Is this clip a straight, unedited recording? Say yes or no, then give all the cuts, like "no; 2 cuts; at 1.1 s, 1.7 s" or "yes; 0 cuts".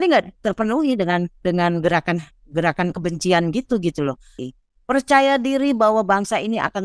no; 1 cut; at 4.3 s